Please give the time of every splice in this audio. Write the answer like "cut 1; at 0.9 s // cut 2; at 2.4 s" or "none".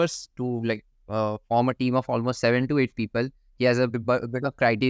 none